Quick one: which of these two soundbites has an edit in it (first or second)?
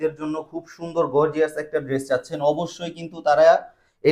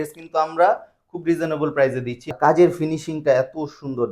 second